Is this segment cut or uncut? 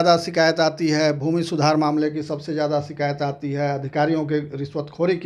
uncut